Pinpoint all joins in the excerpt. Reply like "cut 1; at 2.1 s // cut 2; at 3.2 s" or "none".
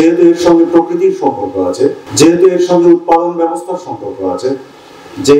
cut 1; at 2.0 s